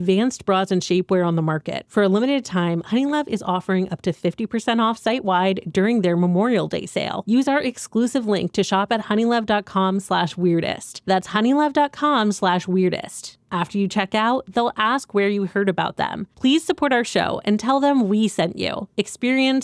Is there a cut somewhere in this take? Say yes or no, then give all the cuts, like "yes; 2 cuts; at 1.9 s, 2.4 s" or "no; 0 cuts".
no; 0 cuts